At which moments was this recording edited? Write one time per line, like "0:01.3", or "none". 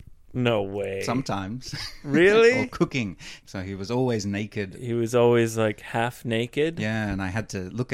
0:03.2

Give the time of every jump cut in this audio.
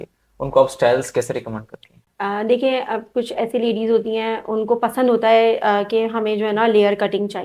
none

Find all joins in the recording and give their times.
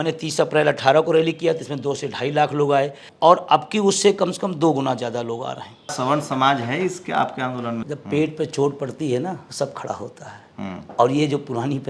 0:03.1
0:05.9
0:07.7
0:09.5

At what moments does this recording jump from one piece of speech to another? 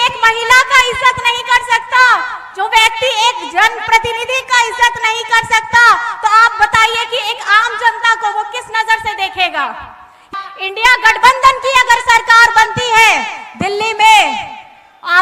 0:10.3

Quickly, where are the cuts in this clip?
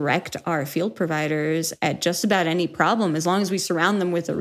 none

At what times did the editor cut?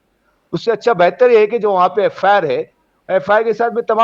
none

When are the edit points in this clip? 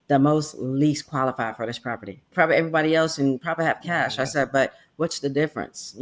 0:02.2

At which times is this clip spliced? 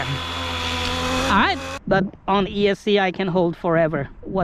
0:01.7

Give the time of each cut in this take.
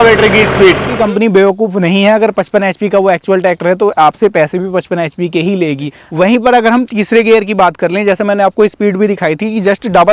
0:00.9
0:06.0

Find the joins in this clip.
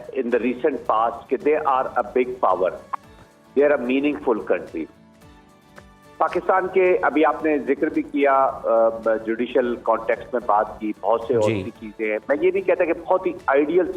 none

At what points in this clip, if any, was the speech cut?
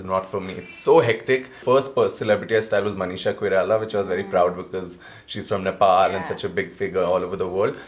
0:01.5

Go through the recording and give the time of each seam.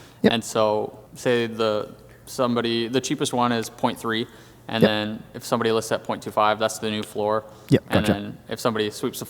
0:01.0

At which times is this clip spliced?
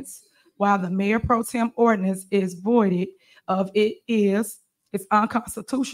none

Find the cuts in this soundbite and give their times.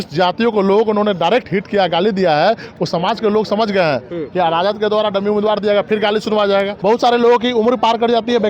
0:06.7

